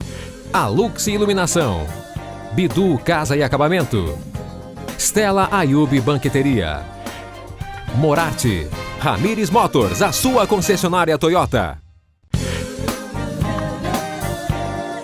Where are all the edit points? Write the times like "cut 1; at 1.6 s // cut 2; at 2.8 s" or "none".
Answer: cut 1; at 11.8 s